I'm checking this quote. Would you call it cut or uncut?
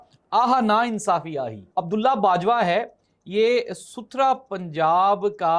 cut